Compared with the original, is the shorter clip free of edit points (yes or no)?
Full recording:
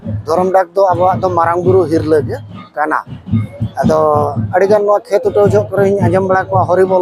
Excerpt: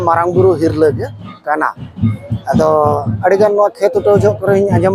yes